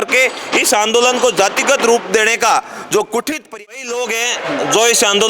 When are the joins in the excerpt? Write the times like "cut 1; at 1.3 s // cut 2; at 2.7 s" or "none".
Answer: cut 1; at 3.5 s